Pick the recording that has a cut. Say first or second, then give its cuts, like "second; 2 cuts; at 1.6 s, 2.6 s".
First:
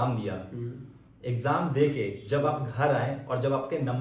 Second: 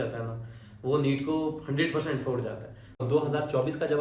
second; 1 cut; at 3.0 s